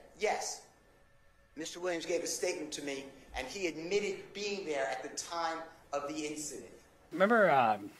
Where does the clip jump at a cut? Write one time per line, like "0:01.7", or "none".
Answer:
0:07.1